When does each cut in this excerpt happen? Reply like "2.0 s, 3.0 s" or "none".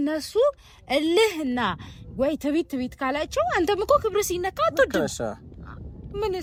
none